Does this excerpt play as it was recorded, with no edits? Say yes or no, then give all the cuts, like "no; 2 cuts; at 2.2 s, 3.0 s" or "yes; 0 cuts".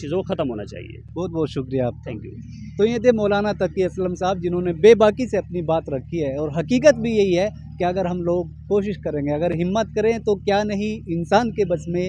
yes; 0 cuts